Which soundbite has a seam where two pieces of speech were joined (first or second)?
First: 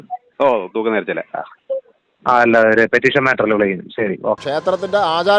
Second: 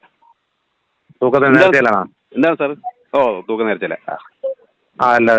first